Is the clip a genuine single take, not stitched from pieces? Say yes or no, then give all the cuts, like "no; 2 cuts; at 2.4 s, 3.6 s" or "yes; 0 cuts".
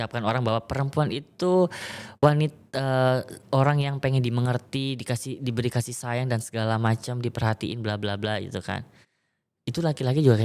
yes; 0 cuts